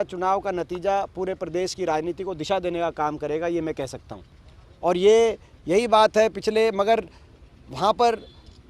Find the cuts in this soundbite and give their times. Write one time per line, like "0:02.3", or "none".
none